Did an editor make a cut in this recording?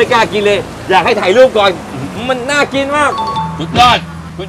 yes; 1 cut; at 3.5 s

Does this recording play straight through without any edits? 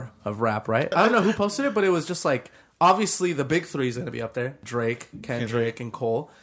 no; 2 cuts; at 0.9 s, 4.6 s

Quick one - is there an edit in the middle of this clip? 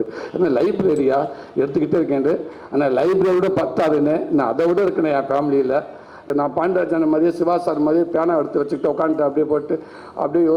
yes; 1 cut; at 6.3 s

